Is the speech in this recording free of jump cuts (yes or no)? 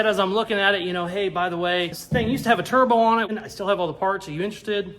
no